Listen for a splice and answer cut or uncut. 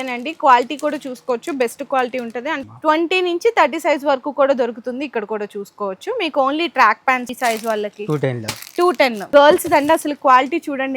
cut